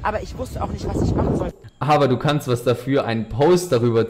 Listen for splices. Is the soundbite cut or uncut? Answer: cut